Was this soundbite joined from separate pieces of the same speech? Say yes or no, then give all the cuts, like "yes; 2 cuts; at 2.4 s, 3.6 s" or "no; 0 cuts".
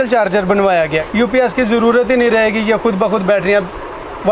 yes; 1 cut; at 1.0 s